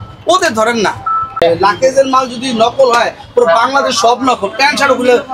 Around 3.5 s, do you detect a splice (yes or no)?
no